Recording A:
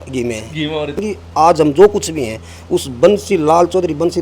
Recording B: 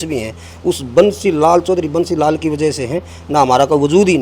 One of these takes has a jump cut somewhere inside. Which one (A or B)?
A